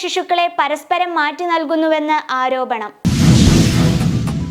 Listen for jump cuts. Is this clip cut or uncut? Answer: cut